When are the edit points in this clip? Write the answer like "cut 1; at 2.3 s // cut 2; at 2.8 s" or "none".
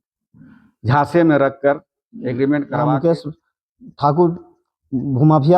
cut 1; at 2.7 s

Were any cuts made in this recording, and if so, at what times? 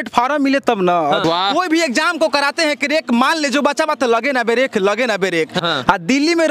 cut 1; at 1.2 s // cut 2; at 5.6 s

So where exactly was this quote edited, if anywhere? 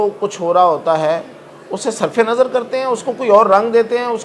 none

